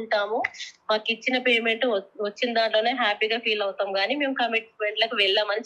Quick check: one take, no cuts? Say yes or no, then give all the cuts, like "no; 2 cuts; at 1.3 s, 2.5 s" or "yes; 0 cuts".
yes; 0 cuts